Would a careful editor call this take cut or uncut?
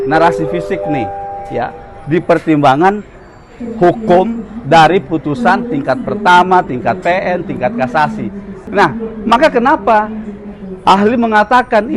cut